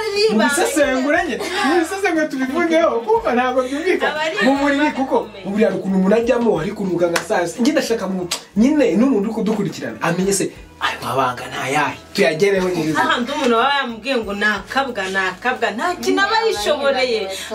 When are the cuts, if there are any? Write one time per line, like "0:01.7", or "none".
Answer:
none